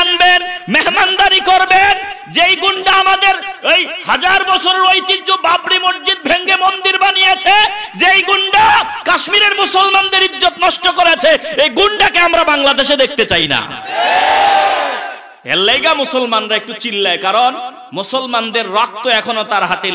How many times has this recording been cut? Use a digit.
0